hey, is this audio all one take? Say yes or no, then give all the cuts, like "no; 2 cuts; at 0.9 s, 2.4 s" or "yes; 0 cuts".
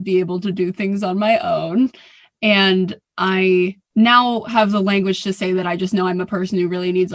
no; 1 cut; at 3.8 s